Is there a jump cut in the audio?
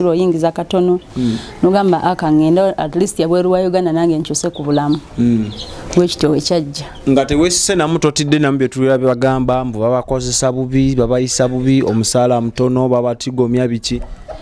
no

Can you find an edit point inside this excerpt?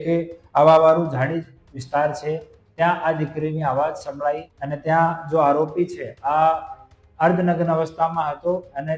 yes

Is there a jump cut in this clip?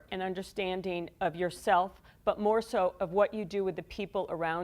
no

